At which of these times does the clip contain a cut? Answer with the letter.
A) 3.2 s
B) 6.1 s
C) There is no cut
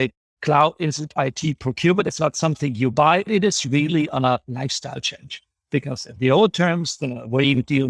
A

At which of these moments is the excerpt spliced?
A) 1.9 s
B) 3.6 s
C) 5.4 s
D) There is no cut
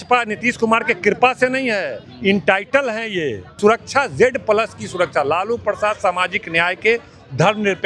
B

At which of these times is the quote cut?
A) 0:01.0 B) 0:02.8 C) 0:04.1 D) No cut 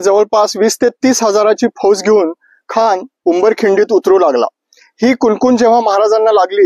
D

